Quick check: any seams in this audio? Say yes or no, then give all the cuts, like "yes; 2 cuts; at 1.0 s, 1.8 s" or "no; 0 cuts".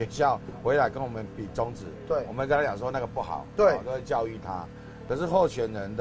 yes; 1 cut; at 5.0 s